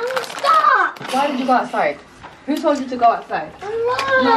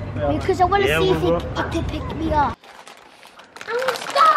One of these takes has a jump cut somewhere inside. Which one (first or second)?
second